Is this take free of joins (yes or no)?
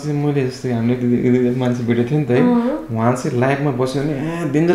yes